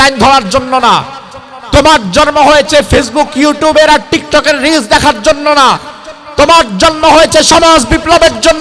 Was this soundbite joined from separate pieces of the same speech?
no; 0 cuts

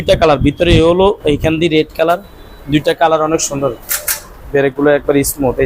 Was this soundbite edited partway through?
yes; 1 cut; at 4.4 s

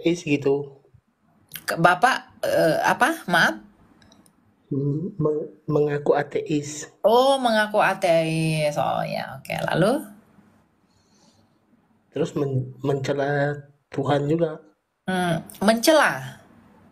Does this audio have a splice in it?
no; 0 cuts

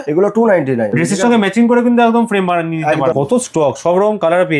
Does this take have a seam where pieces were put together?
yes; 2 cuts; at 0.9 s, 3.1 s

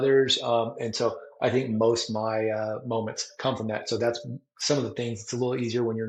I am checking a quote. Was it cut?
no; 0 cuts

